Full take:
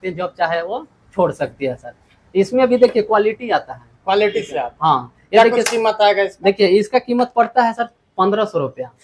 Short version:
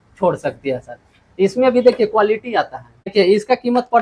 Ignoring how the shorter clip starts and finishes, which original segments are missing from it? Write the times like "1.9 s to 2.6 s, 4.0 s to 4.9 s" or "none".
4.1 s to 6.5 s